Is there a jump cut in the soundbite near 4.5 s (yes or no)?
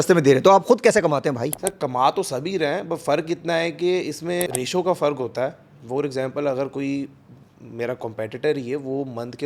yes